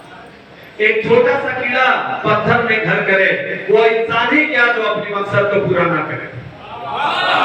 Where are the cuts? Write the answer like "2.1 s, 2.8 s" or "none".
none